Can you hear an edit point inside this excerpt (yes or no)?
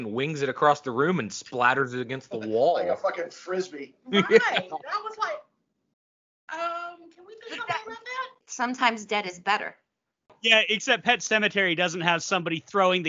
no